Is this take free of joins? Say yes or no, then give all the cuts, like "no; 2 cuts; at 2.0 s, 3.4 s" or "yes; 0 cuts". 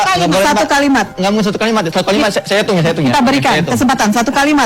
no; 1 cut; at 1.1 s